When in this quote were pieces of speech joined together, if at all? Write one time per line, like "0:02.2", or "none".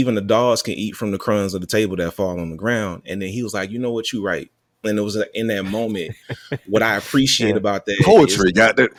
none